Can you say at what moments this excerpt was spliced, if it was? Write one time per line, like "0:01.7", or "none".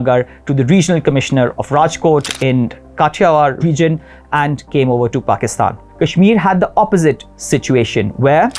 0:03.6
0:05.8